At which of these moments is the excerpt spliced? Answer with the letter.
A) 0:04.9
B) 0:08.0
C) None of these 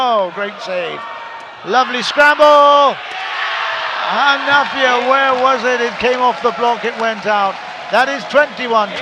C